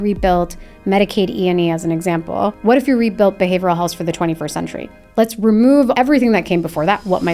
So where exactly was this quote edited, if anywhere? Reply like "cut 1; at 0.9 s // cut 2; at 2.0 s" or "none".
cut 1; at 2.6 s // cut 2; at 5.9 s